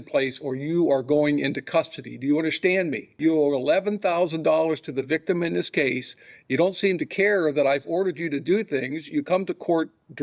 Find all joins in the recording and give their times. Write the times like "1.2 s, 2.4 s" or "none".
3.1 s